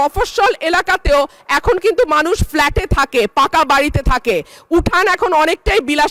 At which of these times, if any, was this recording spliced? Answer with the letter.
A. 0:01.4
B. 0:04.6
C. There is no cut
C